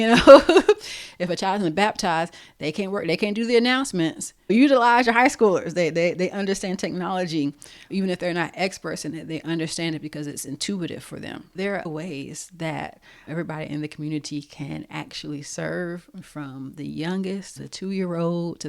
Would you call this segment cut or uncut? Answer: cut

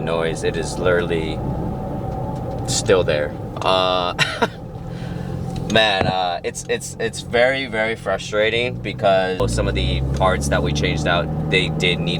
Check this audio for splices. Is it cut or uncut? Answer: uncut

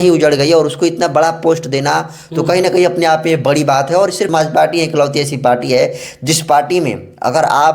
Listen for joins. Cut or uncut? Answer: cut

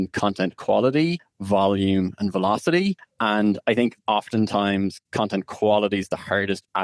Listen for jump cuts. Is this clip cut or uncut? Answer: cut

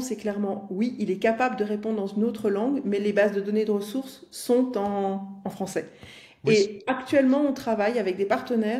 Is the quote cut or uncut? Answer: uncut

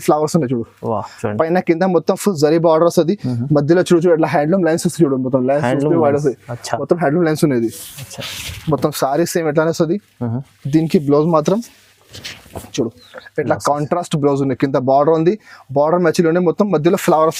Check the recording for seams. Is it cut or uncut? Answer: uncut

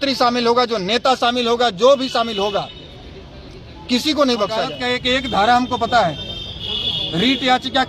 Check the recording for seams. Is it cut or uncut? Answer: cut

